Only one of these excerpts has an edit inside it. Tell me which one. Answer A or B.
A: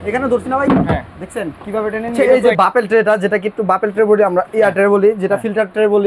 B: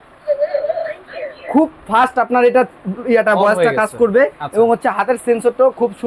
A